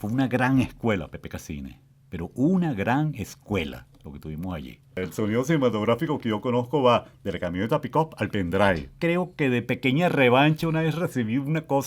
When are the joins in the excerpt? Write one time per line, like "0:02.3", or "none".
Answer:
0:05.0
0:08.9